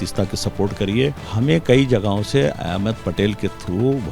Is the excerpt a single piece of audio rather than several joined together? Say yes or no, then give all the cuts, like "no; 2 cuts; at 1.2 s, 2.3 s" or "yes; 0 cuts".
no; 1 cut; at 1.2 s